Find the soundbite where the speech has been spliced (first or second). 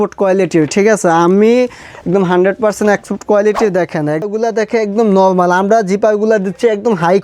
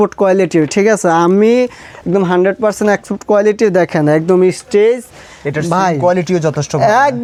first